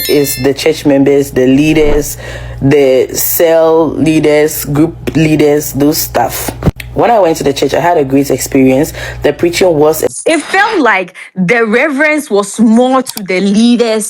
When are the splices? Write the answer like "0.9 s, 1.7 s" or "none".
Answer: 10.1 s